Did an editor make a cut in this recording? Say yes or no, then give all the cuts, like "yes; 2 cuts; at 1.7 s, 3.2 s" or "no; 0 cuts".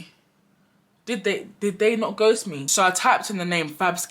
yes; 1 cut; at 2.6 s